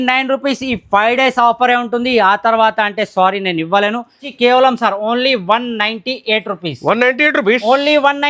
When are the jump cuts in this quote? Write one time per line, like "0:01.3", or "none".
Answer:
0:04.3